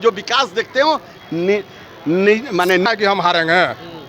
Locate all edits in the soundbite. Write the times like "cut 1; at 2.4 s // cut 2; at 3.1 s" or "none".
cut 1; at 2.8 s